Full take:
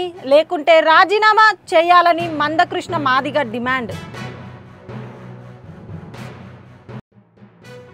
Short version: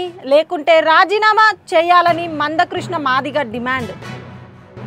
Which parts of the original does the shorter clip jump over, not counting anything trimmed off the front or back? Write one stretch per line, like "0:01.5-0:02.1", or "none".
0:03.9-0:04.1